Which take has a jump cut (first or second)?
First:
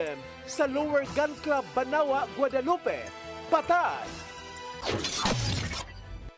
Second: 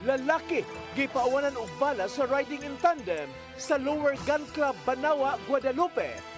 first